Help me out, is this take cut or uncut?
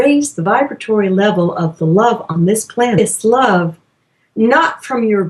uncut